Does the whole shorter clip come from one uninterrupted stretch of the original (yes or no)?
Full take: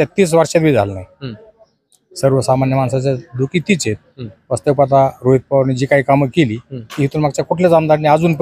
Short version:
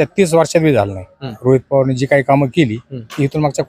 no